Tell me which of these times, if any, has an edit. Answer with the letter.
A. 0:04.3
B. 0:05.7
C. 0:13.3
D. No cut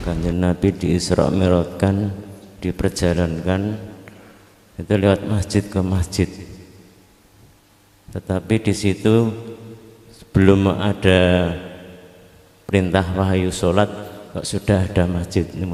D